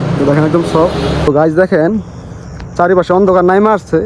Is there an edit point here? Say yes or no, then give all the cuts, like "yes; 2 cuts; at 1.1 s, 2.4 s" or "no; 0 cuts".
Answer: yes; 1 cut; at 1.3 s